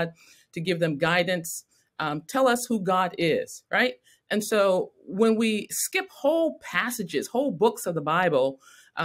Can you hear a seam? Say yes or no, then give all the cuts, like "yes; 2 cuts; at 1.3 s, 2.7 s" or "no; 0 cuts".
no; 0 cuts